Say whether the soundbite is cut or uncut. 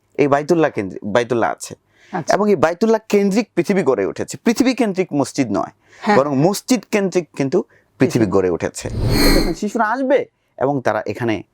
cut